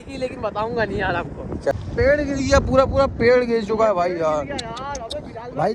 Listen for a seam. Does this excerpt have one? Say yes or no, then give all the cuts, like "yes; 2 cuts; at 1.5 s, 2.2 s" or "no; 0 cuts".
yes; 1 cut; at 1.7 s